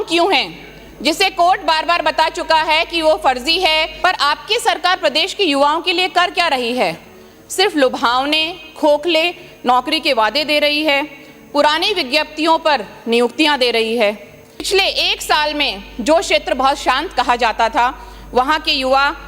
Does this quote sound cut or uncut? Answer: cut